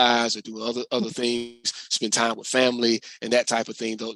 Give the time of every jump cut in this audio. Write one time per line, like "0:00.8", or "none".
none